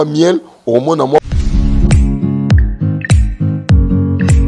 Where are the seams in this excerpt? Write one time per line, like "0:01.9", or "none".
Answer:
0:01.2